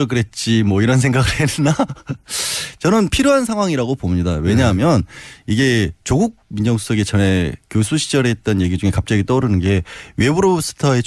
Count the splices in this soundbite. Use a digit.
1